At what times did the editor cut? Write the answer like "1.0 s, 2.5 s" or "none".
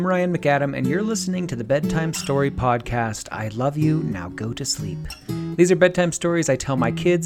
none